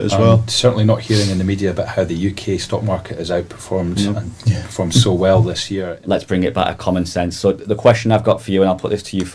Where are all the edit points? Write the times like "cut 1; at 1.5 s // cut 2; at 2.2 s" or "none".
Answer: cut 1; at 5.7 s